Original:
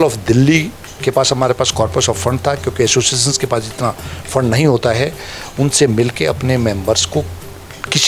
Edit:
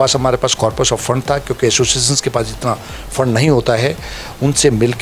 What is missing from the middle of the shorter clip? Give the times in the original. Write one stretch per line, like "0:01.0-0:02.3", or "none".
none